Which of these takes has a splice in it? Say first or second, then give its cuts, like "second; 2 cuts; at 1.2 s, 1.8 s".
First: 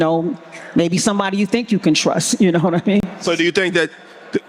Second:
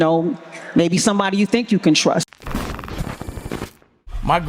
second; 1 cut; at 2.3 s